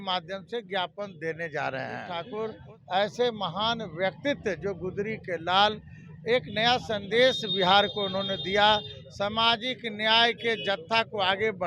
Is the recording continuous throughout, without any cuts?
no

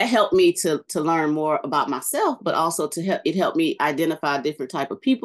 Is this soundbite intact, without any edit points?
yes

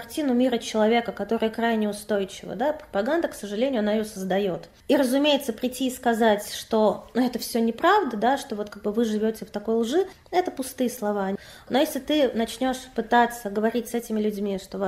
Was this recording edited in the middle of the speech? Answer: yes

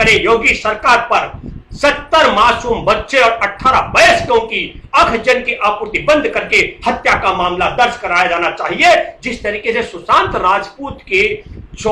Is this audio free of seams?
yes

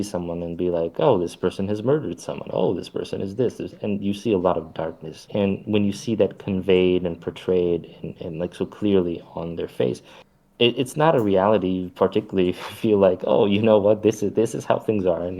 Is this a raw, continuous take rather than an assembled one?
no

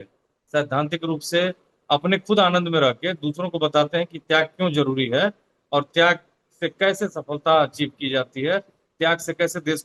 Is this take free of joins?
yes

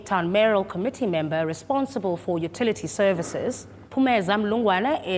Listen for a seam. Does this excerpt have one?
yes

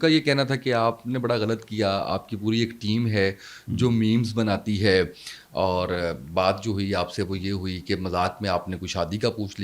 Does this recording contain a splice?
no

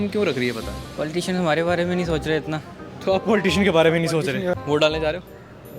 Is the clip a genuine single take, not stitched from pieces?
no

